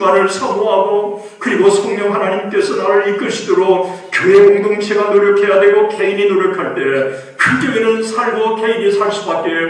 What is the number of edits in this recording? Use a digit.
0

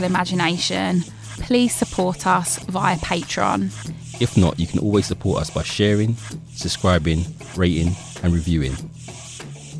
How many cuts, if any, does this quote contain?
1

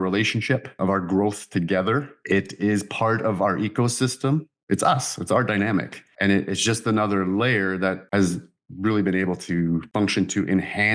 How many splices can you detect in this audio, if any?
4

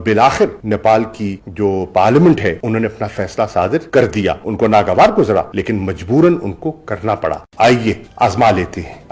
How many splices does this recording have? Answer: 1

